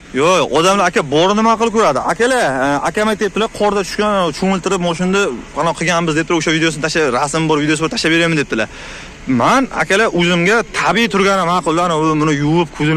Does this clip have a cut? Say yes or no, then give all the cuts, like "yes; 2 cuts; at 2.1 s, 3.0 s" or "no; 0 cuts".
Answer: no; 0 cuts